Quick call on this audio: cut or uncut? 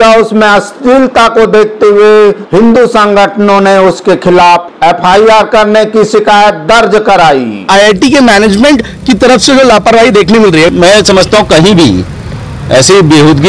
cut